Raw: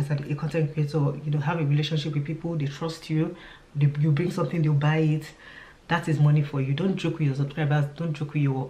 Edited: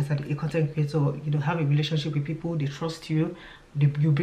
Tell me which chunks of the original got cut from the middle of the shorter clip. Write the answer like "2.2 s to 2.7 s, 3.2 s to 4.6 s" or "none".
none